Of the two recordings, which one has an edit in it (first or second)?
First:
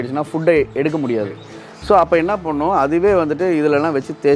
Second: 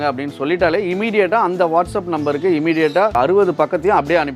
second